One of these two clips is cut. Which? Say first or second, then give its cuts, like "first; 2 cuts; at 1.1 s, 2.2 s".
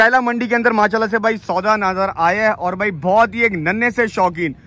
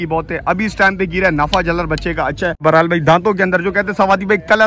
second; 1 cut; at 2.6 s